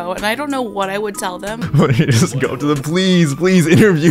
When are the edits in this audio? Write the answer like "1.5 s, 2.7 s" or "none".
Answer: 1.6 s